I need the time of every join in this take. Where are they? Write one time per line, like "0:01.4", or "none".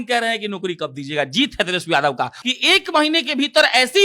0:02.4

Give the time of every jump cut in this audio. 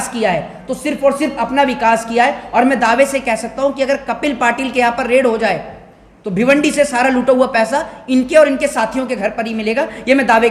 none

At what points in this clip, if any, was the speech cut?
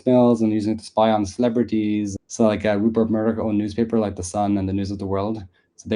0:02.2

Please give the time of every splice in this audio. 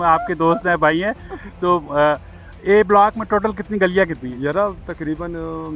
none

